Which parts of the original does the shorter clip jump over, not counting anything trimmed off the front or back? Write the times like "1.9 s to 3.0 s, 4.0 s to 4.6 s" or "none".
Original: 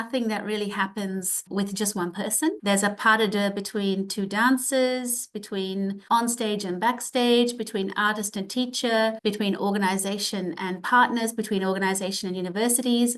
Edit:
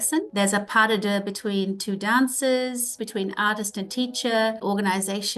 5.3 s to 7.6 s, 9.2 s to 9.6 s